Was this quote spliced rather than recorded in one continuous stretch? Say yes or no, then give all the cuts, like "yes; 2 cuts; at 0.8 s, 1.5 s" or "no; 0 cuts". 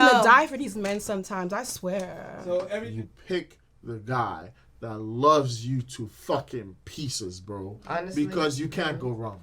yes; 1 cut; at 2.8 s